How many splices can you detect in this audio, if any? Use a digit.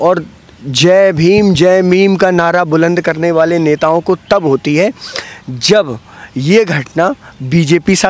0